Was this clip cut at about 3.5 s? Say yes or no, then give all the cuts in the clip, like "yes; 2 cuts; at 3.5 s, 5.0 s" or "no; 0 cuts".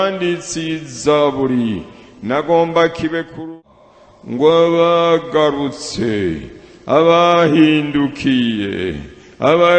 yes; 1 cut; at 3.5 s